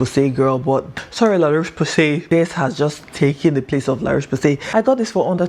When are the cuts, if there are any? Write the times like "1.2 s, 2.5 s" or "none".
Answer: 0.9 s, 2.2 s, 4.6 s